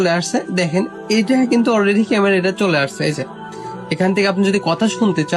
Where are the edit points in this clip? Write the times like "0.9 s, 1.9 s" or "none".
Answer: none